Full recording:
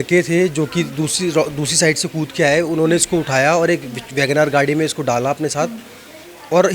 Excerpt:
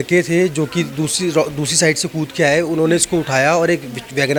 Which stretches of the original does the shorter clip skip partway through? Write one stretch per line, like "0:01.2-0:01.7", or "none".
none